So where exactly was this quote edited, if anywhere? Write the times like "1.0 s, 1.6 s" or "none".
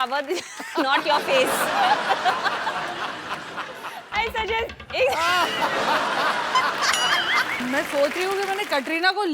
7.6 s